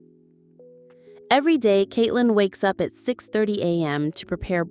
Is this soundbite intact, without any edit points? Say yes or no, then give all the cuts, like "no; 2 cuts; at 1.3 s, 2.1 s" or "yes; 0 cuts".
no; 1 cut; at 1.3 s